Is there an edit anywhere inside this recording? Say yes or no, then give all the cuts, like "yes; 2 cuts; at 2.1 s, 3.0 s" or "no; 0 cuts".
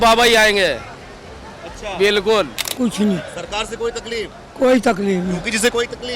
yes; 1 cut; at 2.6 s